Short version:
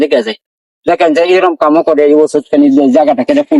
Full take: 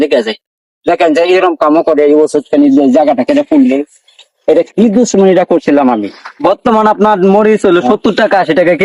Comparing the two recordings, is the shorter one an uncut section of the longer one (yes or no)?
yes